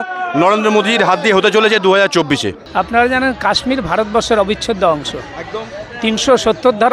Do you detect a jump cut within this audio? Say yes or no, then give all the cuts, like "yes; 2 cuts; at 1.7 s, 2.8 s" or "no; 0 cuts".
yes; 1 cut; at 2.6 s